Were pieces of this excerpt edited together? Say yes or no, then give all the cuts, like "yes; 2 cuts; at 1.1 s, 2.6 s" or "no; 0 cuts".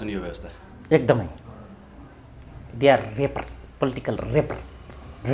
no; 0 cuts